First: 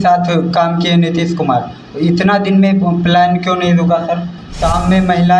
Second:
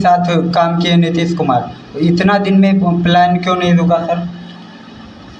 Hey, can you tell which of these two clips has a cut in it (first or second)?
first